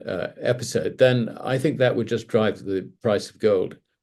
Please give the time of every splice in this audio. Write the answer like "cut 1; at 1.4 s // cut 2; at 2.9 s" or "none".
none

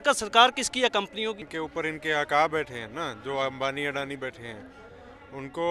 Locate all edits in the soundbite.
cut 1; at 1.5 s

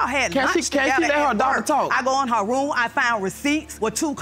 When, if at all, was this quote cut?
cut 1; at 1.9 s

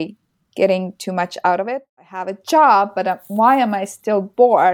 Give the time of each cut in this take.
cut 1; at 1.7 s

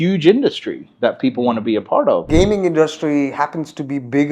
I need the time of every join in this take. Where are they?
cut 1; at 2.3 s

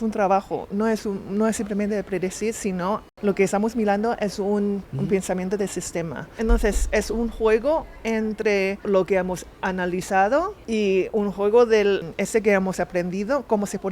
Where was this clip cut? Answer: cut 1; at 3.1 s // cut 2; at 4.9 s // cut 3; at 6.3 s // cut 4; at 8.8 s // cut 5; at 10.6 s // cut 6; at 12.1 s

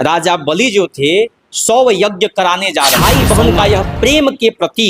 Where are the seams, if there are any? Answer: cut 1; at 3.0 s

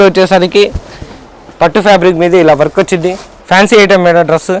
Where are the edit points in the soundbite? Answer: cut 1; at 3.3 s

